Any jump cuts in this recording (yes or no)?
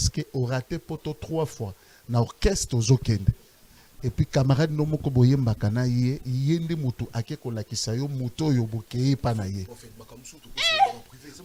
no